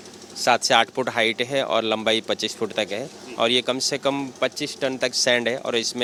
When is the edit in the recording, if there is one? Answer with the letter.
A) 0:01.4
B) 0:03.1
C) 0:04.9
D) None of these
D